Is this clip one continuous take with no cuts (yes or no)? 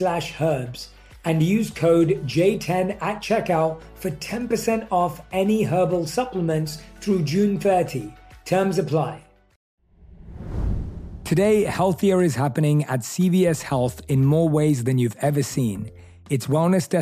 no